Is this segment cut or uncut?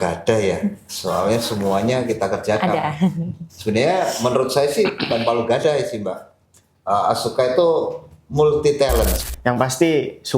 cut